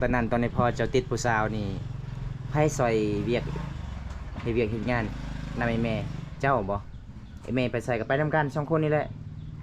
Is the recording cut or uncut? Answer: uncut